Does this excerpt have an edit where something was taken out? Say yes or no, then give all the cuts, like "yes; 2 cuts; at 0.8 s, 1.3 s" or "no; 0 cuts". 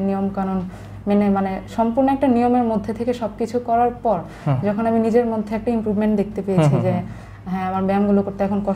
no; 0 cuts